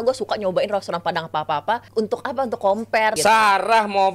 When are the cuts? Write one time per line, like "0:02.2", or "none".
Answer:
0:01.9
0:03.2